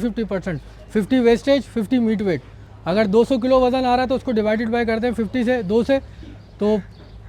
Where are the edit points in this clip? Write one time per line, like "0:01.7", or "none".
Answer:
none

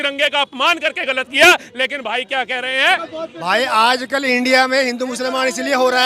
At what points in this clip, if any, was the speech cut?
0:03.1

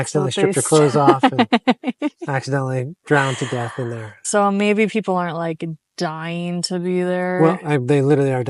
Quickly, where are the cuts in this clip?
0:04.2

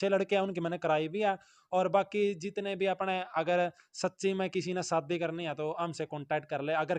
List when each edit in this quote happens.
none

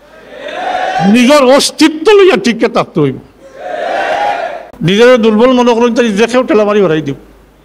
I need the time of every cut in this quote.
0:04.7

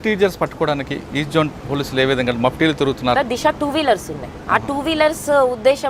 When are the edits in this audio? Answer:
0:03.2

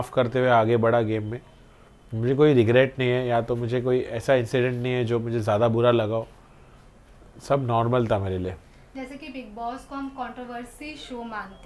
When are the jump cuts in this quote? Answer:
none

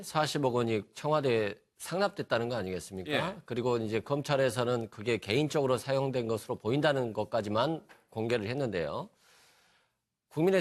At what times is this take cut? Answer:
none

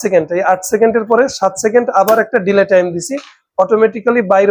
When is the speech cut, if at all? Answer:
none

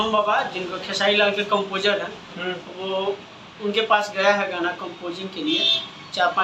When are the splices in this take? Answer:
none

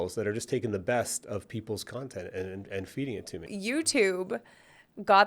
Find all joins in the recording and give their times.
0:03.4

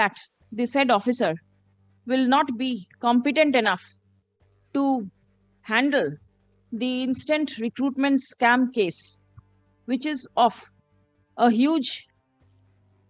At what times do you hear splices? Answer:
none

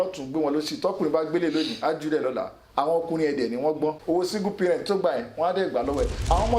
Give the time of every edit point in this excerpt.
0:04.0

